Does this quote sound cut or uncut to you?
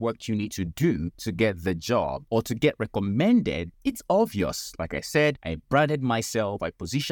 cut